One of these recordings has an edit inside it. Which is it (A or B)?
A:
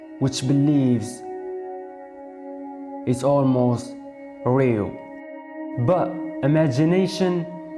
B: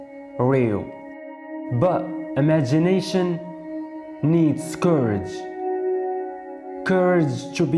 A